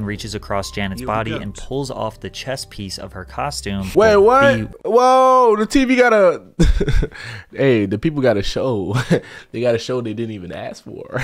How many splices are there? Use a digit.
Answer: 2